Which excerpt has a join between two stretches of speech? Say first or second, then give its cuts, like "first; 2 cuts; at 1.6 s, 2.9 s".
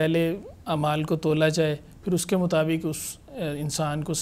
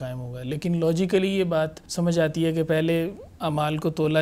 second; 1 cut; at 1.8 s